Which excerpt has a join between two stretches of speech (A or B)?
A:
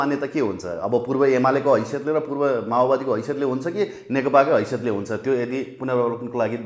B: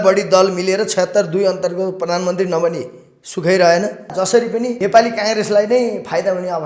B